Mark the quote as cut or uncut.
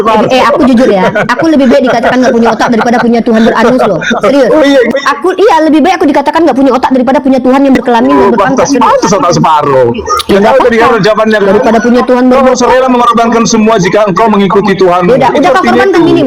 uncut